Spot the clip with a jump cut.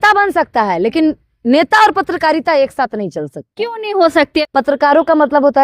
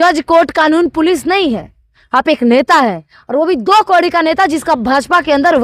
first; 1 cut; at 4.4 s

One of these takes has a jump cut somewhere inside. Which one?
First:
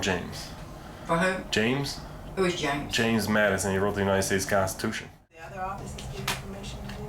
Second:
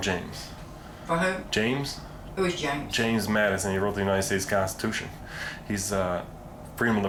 first; 1 cut; at 5.4 s

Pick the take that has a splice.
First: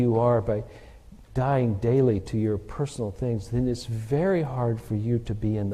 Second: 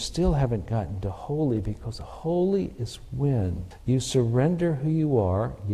second; 1 cut; at 3.7 s

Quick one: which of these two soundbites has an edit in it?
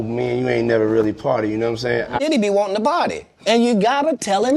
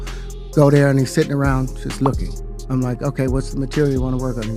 first; 1 cut; at 2.2 s

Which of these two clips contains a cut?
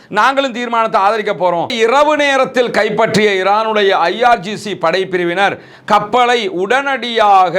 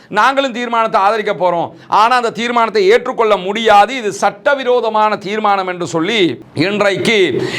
first; 1 cut; at 1.8 s

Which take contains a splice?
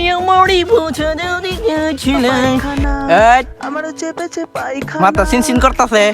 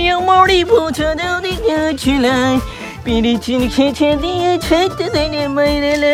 first; 1 cut; at 2.7 s

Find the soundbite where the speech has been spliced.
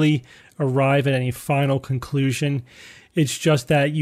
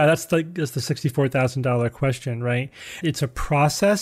second; 1 cut; at 3.0 s

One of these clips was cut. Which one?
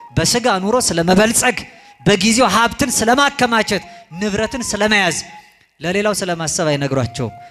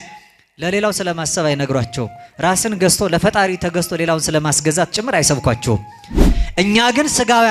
second; 1 cut; at 6.3 s

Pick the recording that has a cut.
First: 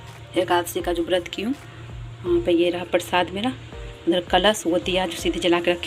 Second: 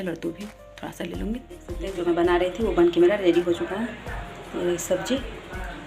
second; 1 cut; at 1.7 s

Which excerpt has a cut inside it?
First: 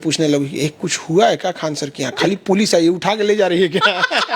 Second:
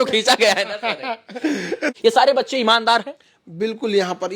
second; 1 cut; at 1.9 s

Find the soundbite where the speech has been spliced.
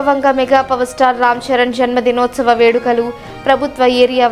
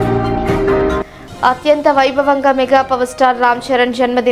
second; 1 cut; at 1.2 s

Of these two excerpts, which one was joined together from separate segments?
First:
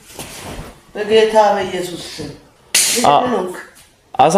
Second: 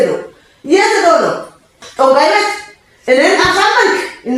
second; 1 cut; at 1.8 s

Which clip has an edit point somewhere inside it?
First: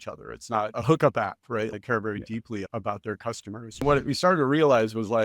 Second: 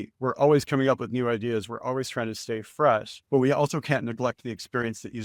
first; 4 cuts; at 0.7 s, 1.7 s, 2.7 s, 3.8 s

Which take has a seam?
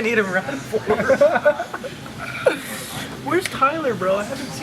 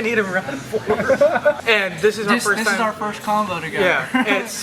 second; 1 cut; at 1.6 s

